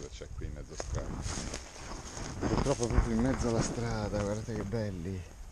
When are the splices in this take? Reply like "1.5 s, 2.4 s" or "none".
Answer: none